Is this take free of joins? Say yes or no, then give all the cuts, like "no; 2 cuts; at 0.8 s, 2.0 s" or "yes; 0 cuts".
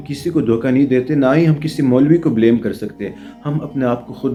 yes; 0 cuts